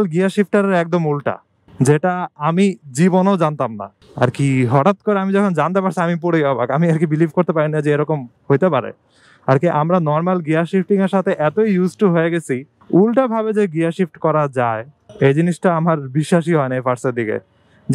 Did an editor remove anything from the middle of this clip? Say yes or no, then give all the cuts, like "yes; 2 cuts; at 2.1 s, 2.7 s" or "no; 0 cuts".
no; 0 cuts